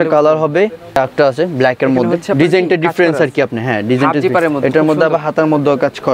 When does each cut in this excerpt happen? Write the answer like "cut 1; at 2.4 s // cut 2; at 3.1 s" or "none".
cut 1; at 1.0 s